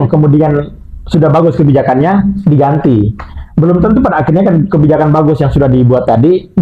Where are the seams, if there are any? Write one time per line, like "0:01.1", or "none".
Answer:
none